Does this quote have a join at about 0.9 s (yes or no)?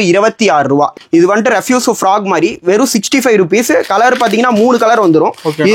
yes